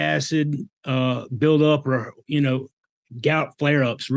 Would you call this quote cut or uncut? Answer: uncut